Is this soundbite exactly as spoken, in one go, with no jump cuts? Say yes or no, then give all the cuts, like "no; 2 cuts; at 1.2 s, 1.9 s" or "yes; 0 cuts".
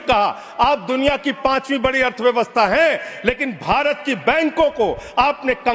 yes; 0 cuts